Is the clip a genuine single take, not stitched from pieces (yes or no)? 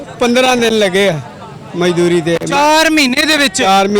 yes